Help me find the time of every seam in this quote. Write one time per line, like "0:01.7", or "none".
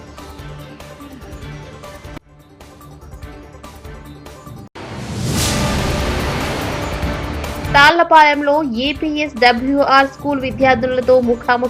0:07.7